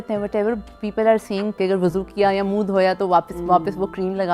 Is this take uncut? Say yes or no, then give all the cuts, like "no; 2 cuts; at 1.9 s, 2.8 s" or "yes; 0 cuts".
no; 1 cut; at 1.6 s